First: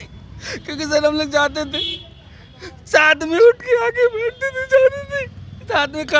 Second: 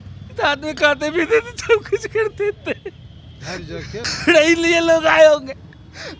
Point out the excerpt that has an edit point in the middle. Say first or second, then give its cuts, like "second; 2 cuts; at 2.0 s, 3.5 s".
second; 1 cut; at 4.1 s